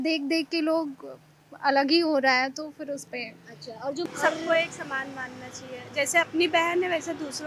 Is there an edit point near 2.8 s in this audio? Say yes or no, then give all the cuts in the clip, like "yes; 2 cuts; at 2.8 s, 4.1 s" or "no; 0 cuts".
no; 1 cut; at 4.1 s